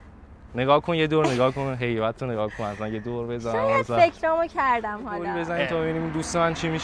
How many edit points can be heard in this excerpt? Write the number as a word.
one